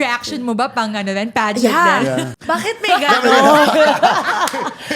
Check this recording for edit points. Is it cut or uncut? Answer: cut